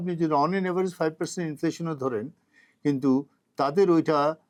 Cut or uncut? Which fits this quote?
uncut